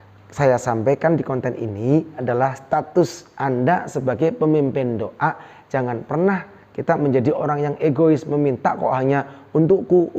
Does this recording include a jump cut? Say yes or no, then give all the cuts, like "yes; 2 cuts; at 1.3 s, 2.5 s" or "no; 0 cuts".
yes; 1 cut; at 2.2 s